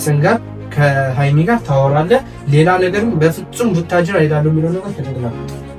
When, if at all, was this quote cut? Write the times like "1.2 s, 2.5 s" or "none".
none